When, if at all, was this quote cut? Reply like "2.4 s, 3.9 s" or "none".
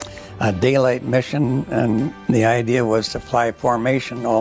2.2 s

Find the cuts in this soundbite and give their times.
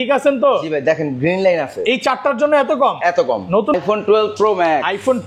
3.7 s

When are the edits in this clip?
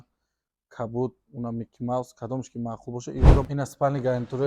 3.5 s

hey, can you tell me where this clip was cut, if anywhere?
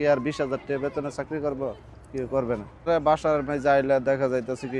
2.9 s

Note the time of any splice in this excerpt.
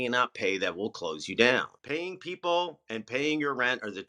1.7 s

